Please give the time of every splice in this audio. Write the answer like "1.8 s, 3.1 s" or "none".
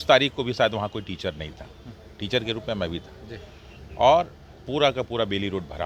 none